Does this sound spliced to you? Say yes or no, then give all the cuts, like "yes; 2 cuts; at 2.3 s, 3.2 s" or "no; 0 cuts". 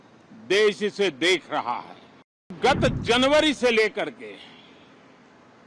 yes; 1 cut; at 2.6 s